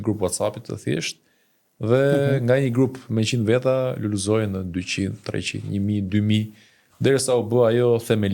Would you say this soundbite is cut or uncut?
uncut